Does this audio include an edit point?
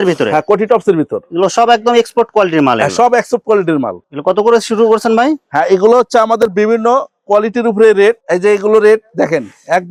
no; 0 cuts

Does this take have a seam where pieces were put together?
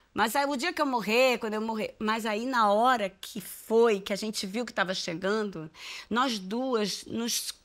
no; 0 cuts

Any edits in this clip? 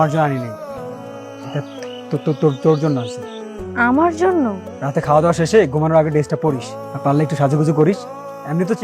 yes; 1 cut; at 1.0 s

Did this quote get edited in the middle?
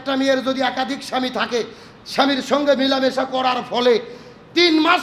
no; 0 cuts

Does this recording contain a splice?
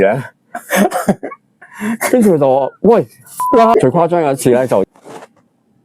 yes; 1 cut; at 3.7 s

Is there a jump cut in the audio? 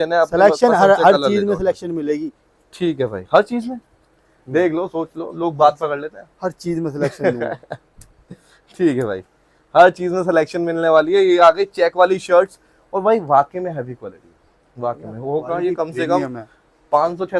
no; 0 cuts

